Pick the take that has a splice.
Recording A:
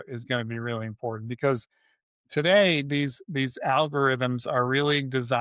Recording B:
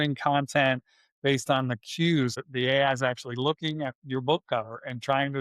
B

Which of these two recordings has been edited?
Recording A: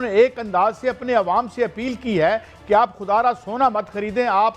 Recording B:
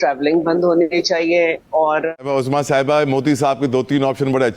B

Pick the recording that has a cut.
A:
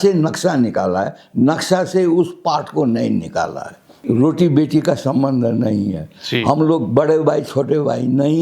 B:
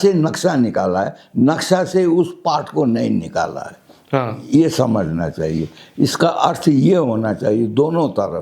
A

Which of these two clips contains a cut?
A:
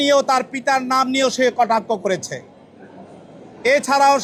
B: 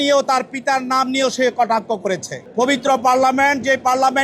B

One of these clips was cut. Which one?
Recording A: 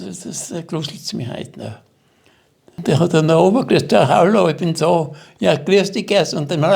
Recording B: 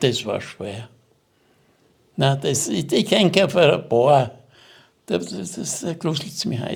A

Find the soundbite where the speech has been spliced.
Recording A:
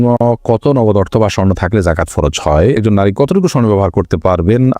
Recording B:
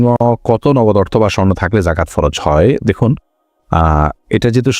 A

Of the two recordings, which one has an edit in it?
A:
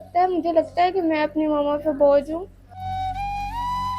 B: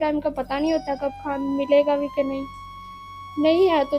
A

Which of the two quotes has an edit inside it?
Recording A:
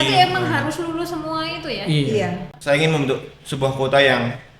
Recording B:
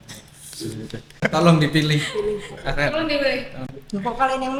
A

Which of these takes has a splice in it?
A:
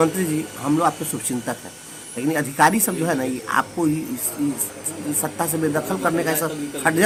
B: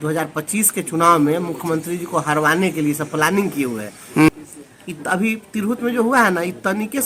B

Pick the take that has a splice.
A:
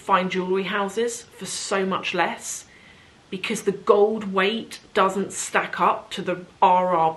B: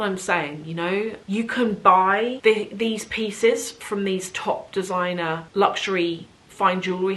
B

